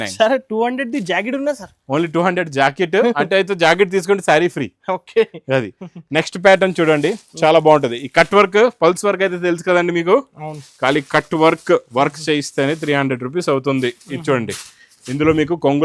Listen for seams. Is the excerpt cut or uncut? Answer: uncut